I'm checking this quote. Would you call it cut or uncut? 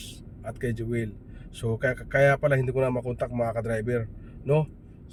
uncut